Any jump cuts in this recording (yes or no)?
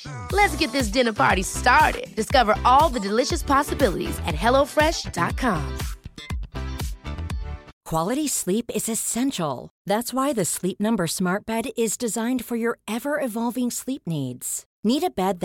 yes